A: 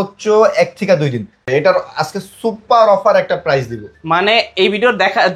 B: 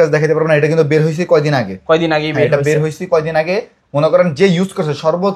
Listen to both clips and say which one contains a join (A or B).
A